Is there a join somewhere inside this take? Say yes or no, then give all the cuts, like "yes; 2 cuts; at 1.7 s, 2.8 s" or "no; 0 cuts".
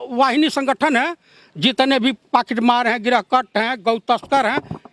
no; 0 cuts